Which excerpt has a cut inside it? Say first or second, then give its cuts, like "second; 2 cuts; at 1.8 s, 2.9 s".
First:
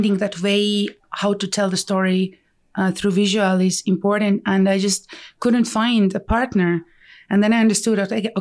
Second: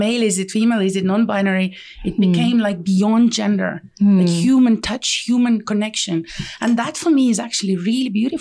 first; 1 cut; at 1.0 s